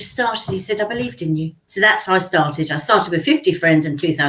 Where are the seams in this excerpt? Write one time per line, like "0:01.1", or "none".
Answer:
0:01.6